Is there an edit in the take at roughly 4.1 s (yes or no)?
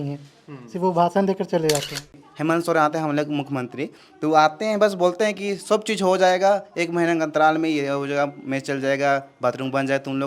no